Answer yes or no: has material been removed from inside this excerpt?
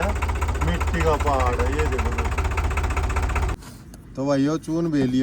yes